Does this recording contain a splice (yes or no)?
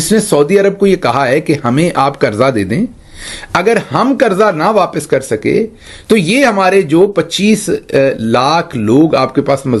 no